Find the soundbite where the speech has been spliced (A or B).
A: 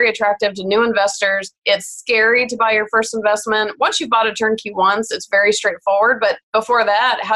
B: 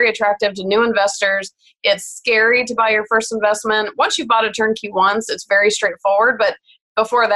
A